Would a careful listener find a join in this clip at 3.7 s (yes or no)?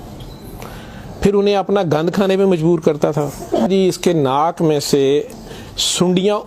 yes